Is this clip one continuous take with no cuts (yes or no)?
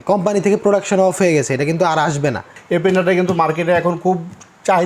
no